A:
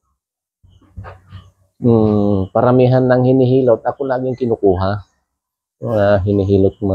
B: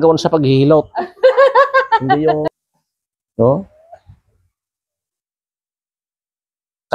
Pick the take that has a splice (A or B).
B